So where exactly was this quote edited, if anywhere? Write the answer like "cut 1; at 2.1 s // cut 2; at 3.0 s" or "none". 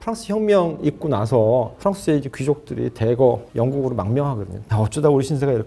cut 1; at 4.6 s